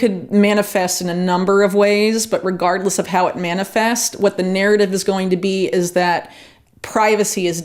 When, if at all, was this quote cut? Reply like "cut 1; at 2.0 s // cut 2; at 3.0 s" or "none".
none